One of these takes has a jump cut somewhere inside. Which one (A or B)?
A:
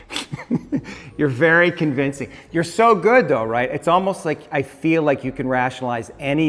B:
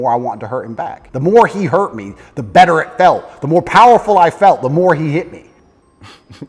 B